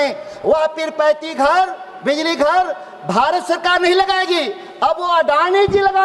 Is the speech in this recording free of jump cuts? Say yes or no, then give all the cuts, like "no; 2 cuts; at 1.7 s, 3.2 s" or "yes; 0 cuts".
yes; 0 cuts